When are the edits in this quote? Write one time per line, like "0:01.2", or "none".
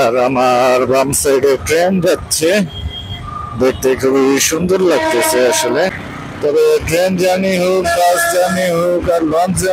none